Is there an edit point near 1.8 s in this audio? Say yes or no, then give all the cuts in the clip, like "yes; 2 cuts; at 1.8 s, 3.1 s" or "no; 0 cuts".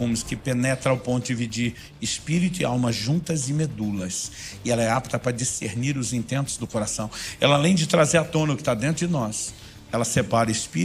no; 0 cuts